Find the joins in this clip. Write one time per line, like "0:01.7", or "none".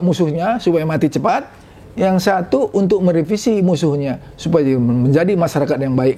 none